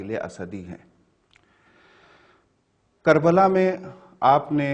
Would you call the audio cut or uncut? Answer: uncut